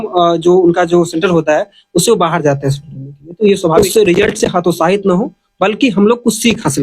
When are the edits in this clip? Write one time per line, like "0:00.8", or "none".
0:03.8